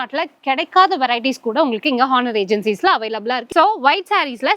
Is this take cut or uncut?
cut